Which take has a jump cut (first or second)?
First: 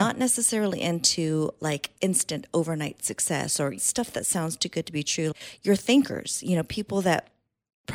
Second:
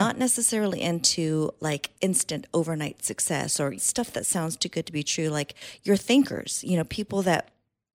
first